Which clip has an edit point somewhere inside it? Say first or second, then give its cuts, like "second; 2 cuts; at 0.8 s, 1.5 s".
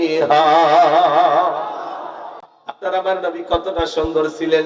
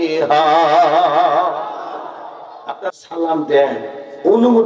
second; 1 cut; at 2.9 s